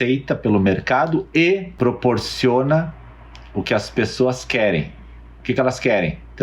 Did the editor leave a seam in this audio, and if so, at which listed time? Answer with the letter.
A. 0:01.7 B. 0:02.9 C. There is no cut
A